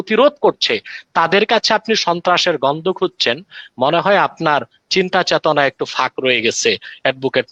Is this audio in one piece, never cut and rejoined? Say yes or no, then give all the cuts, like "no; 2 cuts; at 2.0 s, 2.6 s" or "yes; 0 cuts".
yes; 0 cuts